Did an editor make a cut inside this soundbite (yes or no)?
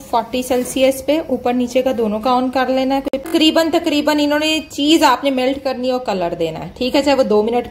no